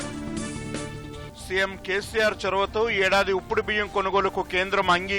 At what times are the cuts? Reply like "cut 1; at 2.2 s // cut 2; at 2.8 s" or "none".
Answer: cut 1; at 1.2 s